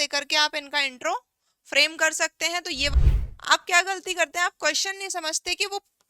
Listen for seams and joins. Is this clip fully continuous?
no; 1 cut; at 2.9 s

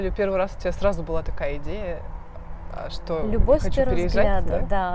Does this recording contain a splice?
no; 0 cuts

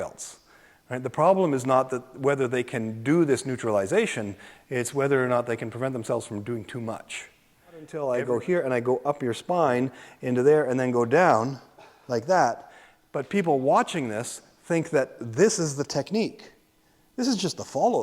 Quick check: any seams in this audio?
yes; 1 cut; at 7.9 s

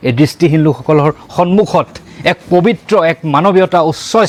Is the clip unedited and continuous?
yes; 0 cuts

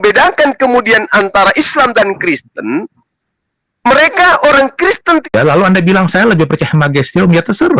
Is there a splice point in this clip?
yes; 1 cut; at 5.3 s

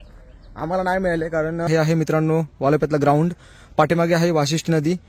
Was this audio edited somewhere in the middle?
yes; 1 cut; at 1.7 s

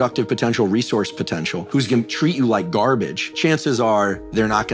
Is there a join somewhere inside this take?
yes; 2 cuts; at 1.7 s, 3.2 s

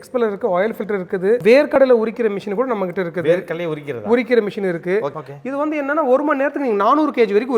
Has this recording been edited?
yes; 2 cuts; at 1.4 s, 5.1 s

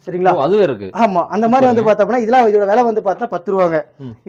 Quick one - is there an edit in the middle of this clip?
no; 0 cuts

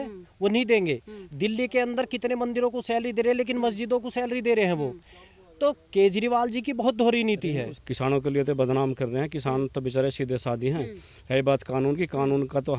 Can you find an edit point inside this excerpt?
yes; 1 cut; at 7.8 s

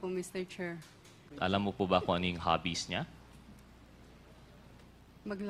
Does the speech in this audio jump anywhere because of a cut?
yes; 1 cut; at 1.2 s

